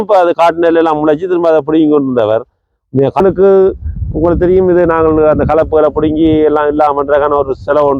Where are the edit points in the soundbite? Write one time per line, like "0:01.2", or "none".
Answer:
0:03.2

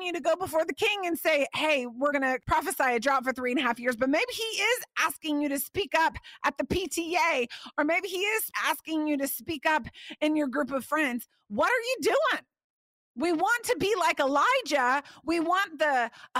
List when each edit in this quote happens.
0:08.5

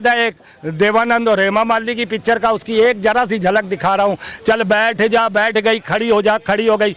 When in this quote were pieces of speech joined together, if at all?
none

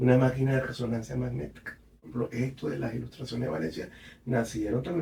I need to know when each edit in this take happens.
0:02.0

